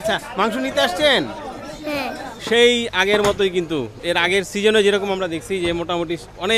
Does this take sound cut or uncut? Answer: cut